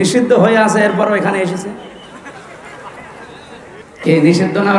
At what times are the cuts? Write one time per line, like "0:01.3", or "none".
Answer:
0:03.8